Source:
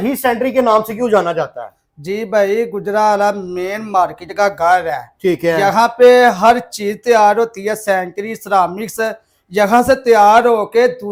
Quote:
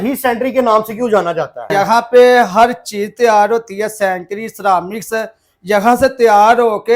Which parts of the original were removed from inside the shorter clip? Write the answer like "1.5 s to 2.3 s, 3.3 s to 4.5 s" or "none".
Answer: 1.7 s to 5.6 s